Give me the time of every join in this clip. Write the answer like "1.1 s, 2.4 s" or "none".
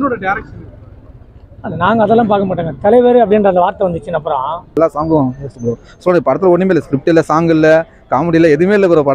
4.8 s